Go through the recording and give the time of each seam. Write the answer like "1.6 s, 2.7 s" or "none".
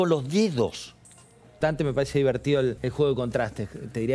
1.6 s, 2.8 s